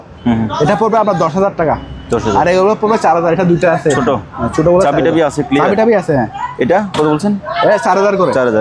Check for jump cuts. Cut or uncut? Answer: uncut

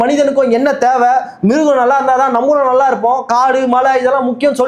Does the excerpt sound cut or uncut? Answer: uncut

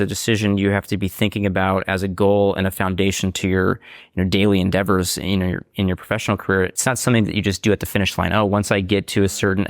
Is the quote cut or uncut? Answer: cut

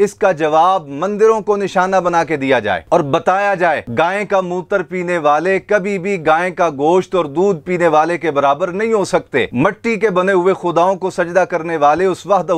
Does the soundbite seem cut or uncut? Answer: uncut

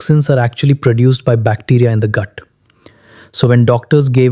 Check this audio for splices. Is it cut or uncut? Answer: uncut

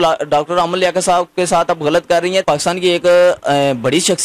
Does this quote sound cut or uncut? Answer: cut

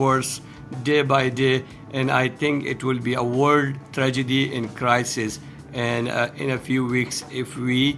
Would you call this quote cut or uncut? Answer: uncut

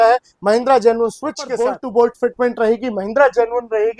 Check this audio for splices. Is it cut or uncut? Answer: cut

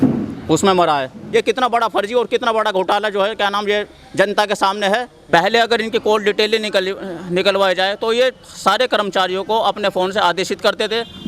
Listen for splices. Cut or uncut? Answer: cut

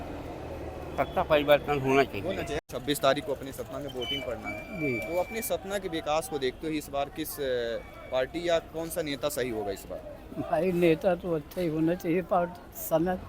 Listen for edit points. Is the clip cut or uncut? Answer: cut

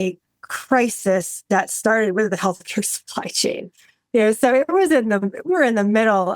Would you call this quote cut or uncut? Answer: uncut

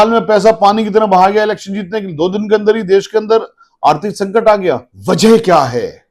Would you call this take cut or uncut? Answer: cut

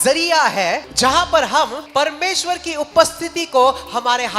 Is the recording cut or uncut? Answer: cut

